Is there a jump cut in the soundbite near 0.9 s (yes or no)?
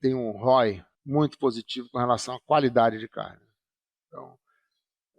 yes